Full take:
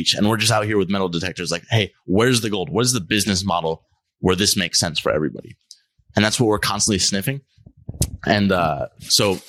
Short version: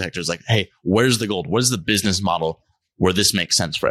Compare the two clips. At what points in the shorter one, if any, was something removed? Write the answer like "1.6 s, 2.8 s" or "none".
none